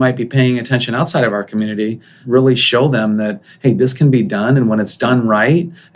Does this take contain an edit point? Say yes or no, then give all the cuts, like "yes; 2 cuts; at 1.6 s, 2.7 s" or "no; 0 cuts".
yes; 1 cut; at 2.1 s